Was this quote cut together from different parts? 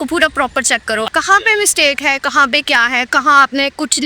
yes; 1 cut; at 1.1 s

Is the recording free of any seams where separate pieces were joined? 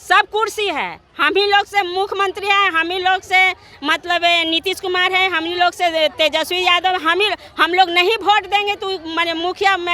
yes; 0 cuts

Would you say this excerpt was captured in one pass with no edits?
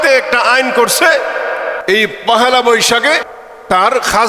no; 2 cuts; at 1.8 s, 3.3 s

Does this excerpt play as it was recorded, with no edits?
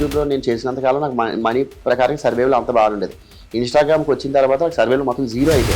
yes; 0 cuts

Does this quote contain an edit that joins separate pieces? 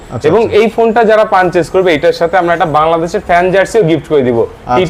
no; 0 cuts

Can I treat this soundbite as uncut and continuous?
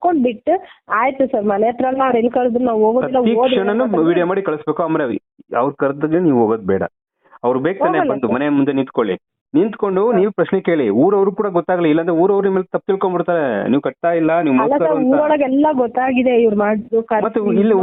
yes; 0 cuts

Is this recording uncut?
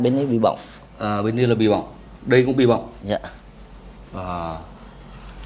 yes; 0 cuts

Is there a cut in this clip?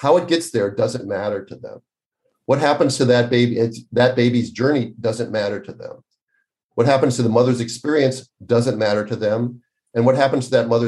no; 0 cuts

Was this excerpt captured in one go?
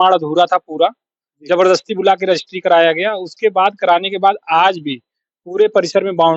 yes; 0 cuts

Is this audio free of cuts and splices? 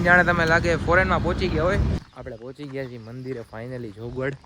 no; 1 cut; at 2.0 s

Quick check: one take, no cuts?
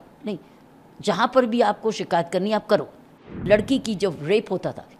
no; 1 cut; at 3.3 s

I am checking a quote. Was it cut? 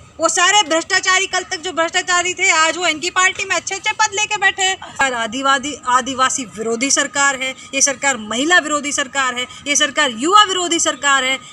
yes; 1 cut; at 5.0 s

